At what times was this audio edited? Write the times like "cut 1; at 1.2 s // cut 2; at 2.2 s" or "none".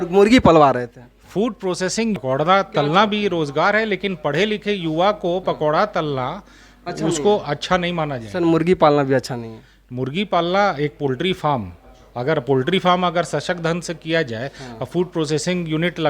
cut 1; at 2.2 s